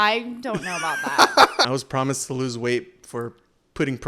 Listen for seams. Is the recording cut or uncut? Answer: cut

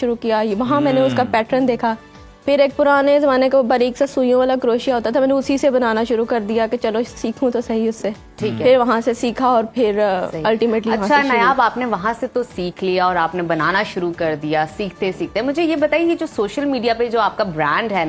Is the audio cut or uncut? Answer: uncut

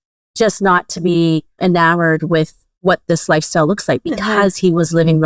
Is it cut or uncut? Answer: cut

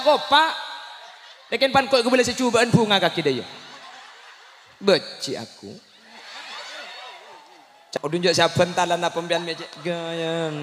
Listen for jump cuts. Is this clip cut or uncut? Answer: cut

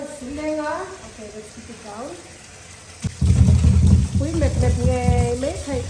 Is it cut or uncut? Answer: cut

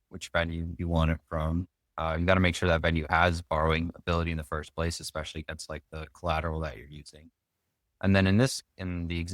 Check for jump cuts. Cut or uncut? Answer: uncut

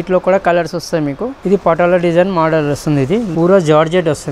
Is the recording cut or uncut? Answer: cut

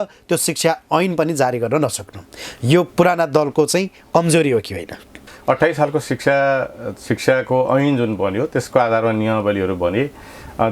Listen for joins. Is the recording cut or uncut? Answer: cut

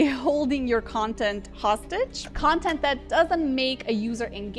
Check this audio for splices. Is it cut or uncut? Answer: cut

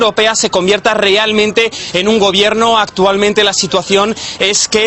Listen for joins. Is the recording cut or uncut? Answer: uncut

